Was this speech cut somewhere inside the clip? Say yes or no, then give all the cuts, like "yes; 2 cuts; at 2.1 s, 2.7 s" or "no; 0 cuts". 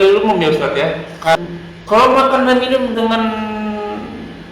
yes; 1 cut; at 1.4 s